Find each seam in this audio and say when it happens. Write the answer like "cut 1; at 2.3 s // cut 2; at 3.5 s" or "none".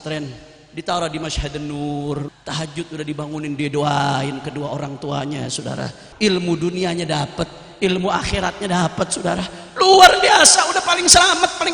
cut 1; at 2.3 s // cut 2; at 6.0 s